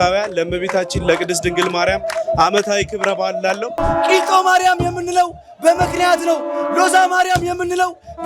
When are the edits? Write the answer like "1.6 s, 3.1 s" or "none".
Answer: 3.8 s